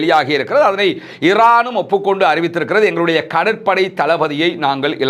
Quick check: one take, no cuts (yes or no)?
yes